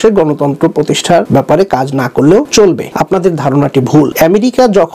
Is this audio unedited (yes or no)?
no